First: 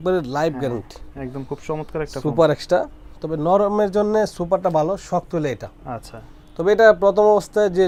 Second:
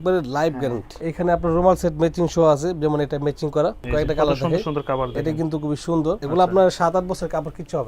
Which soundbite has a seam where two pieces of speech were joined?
second; 3 cuts; at 1.0 s, 3.8 s, 6.2 s

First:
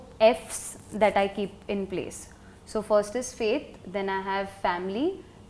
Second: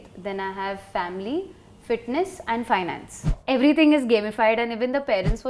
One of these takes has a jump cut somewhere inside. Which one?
second; 1 cut; at 3.3 s

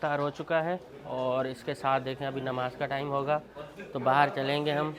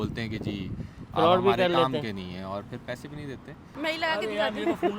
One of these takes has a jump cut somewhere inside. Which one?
second; 1 cut; at 3.7 s

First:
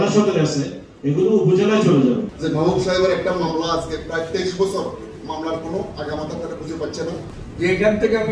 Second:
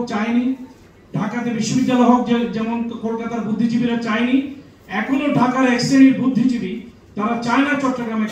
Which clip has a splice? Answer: first; 2 cuts; at 2.3 s, 7.4 s

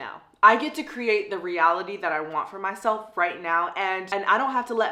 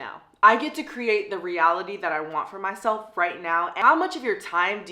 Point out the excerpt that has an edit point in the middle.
second; 1 cut; at 3.8 s

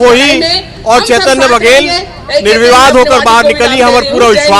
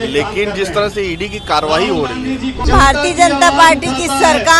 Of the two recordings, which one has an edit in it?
second; 1 cut; at 2.7 s

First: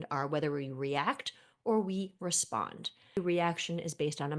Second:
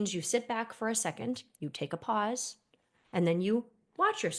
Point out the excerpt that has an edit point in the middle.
first; 1 cut; at 3.2 s

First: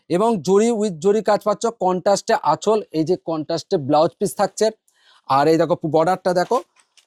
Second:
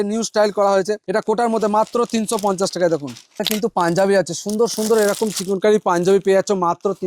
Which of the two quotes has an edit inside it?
second; 2 cuts; at 1.0 s, 3.4 s

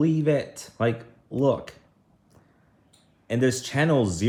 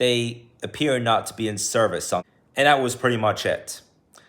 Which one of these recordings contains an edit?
second; 1 cut; at 2.4 s

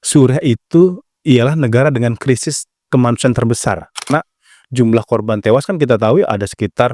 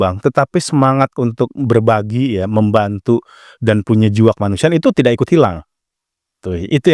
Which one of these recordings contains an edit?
first; 1 cut; at 4.1 s

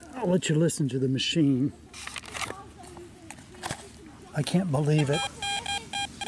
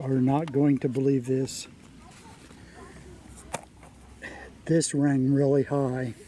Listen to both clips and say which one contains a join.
first; 1 cut; at 5.2 s

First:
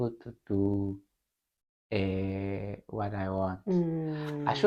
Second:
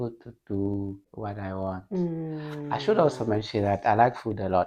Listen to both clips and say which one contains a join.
second; 1 cut; at 1.1 s

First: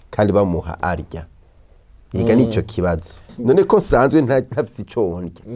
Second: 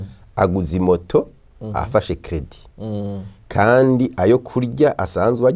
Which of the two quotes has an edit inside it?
first; 1 cut; at 3.2 s

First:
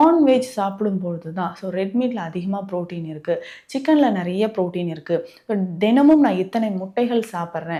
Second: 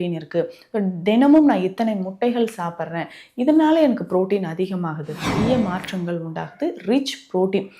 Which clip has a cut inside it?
second; 1 cut; at 5.2 s

